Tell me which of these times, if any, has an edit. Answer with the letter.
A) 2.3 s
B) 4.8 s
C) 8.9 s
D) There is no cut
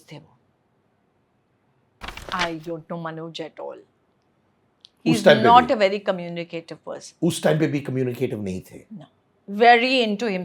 A